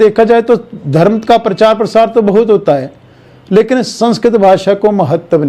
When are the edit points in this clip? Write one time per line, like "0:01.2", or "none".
none